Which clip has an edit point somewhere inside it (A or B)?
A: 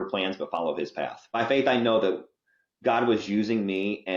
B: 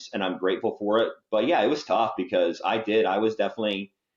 A